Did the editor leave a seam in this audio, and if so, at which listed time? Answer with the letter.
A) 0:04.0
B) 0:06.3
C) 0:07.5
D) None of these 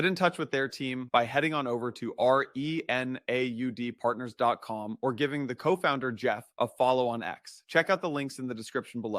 D